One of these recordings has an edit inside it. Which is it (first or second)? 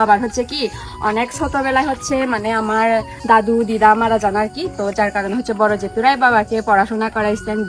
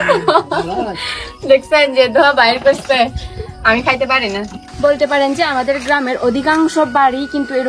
second